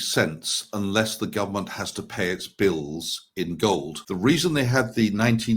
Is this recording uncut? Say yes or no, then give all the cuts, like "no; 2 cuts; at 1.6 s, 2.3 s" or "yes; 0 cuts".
no; 1 cut; at 4.0 s